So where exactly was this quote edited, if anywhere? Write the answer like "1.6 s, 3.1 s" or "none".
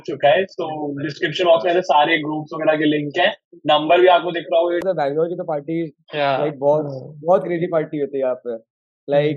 4.8 s